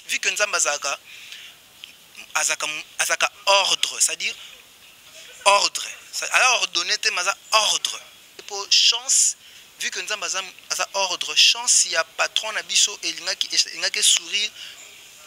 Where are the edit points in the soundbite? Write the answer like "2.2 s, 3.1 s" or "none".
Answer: 8.4 s